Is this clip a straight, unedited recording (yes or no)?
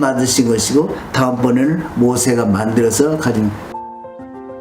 no